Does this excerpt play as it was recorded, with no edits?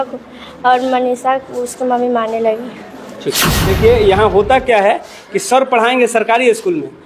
no; 1 cut; at 3.7 s

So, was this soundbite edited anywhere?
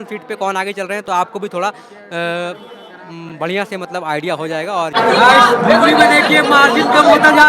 yes; 1 cut; at 4.9 s

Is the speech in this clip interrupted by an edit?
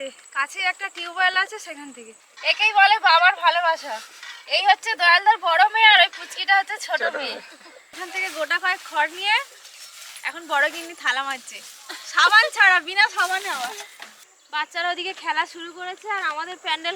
yes; 3 cuts; at 2.3 s, 8.0 s, 14.1 s

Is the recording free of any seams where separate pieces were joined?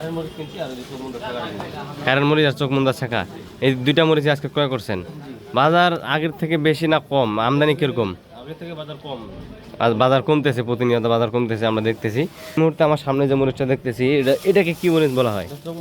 no; 1 cut; at 12.6 s

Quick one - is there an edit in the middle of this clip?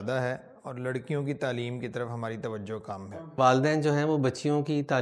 yes; 1 cut; at 3.2 s

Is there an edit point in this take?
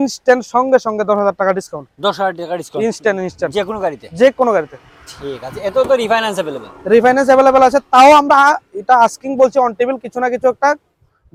no; 0 cuts

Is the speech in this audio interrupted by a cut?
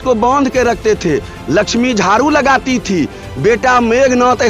no; 0 cuts

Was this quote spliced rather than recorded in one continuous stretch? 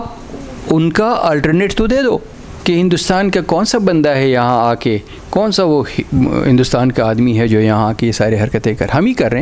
yes; 1 cut; at 2.4 s

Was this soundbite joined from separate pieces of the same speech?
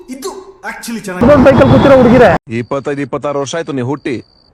yes; 2 cuts; at 1.2 s, 2.4 s

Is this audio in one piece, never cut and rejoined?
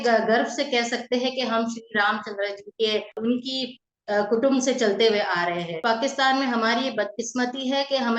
no; 2 cuts; at 3.2 s, 5.8 s

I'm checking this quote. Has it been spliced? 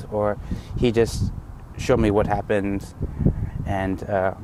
no; 0 cuts

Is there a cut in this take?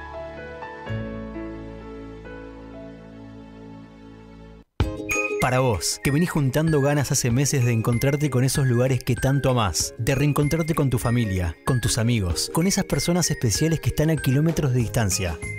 yes; 1 cut; at 4.6 s

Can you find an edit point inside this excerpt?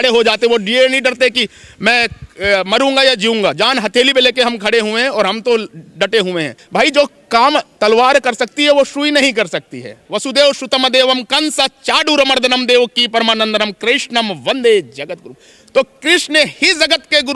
yes; 2 cuts; at 6.6 s, 10.1 s

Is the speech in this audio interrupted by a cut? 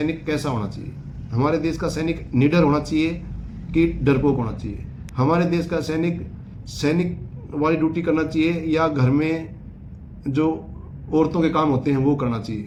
no; 0 cuts

